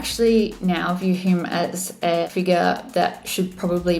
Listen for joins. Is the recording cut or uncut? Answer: cut